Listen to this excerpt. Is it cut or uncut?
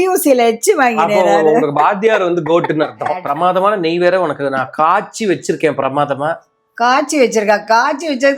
cut